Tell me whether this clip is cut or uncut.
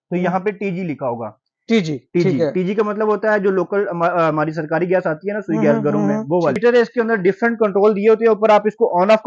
cut